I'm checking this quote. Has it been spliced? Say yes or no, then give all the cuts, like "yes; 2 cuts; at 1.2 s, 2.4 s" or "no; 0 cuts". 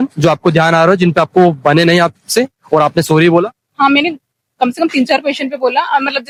no; 0 cuts